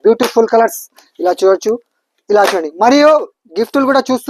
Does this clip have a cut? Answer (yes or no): no